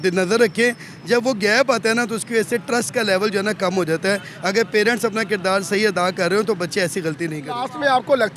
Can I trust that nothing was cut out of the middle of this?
no; 1 cut; at 7.4 s

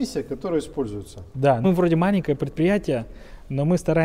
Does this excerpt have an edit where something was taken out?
yes; 1 cut; at 1.6 s

